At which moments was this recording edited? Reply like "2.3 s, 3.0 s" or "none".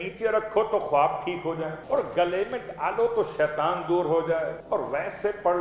1.8 s, 4.6 s